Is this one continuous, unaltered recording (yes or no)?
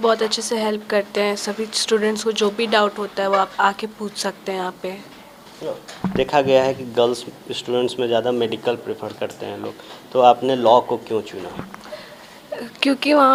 yes